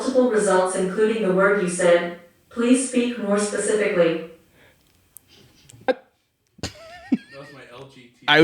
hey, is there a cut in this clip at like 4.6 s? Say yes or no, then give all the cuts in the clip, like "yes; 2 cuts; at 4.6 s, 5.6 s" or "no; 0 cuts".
no; 1 cut; at 5.9 s